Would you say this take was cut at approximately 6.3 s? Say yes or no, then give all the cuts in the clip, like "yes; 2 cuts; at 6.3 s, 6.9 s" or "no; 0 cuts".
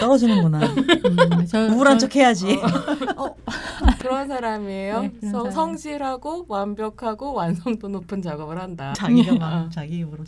no; 2 cuts; at 4.0 s, 8.9 s